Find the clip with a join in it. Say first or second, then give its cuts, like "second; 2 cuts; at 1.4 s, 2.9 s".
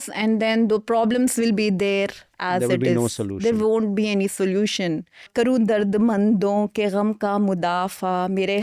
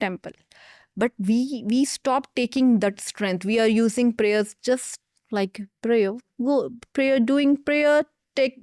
first; 1 cut; at 5.3 s